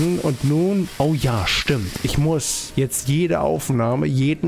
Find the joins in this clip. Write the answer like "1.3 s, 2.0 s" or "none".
0.9 s, 2.6 s